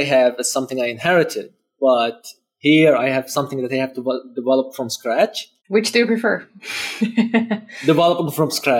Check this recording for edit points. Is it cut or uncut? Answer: uncut